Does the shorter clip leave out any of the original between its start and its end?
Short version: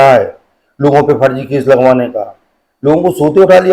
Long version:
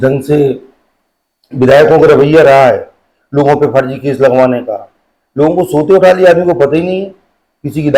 no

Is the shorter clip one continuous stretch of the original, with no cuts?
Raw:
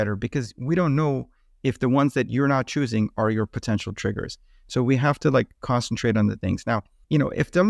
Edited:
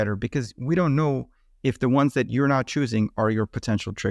yes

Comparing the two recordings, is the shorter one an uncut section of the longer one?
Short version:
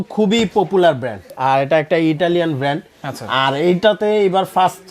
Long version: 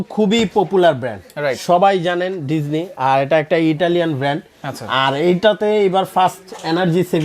no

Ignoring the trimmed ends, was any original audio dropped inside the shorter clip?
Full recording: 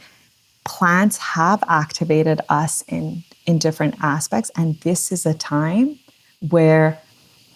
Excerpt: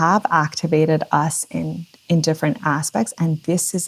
no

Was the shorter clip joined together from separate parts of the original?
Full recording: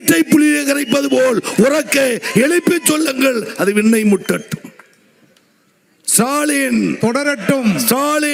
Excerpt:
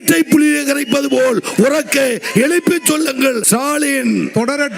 yes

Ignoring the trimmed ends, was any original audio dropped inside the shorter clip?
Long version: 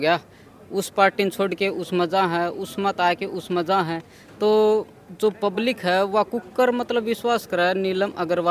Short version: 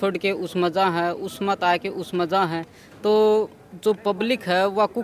no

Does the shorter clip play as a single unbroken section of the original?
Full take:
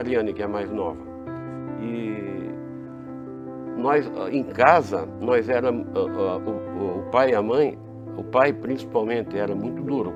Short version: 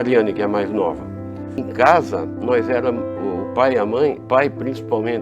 no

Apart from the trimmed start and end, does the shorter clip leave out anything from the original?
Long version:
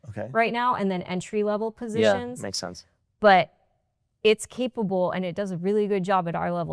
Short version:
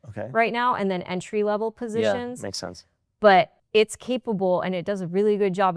yes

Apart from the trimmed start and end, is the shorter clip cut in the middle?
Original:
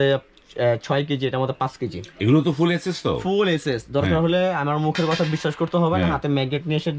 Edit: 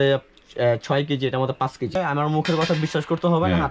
yes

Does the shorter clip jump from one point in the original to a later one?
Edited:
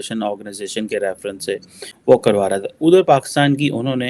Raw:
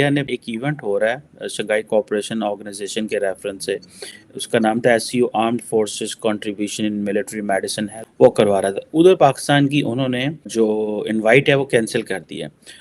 yes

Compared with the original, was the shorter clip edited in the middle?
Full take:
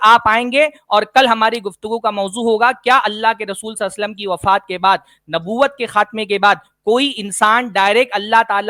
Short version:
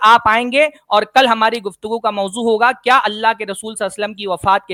no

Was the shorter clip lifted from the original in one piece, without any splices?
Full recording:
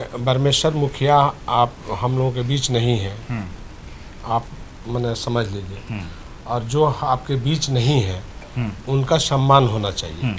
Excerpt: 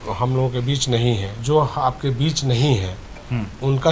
no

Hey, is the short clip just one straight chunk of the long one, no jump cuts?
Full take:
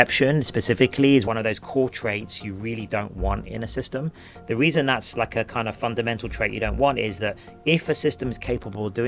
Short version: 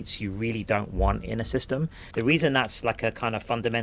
no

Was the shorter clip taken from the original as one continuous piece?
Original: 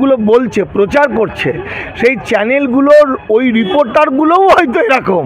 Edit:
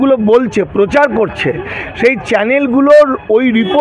yes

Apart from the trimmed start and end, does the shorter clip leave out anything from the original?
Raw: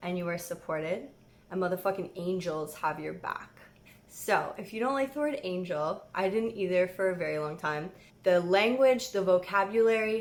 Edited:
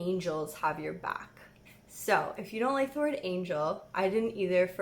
no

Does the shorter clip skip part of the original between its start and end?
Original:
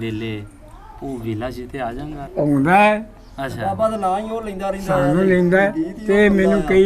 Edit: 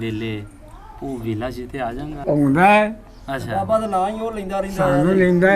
yes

